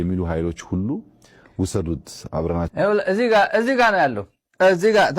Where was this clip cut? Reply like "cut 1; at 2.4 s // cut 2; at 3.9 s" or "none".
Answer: cut 1; at 2.7 s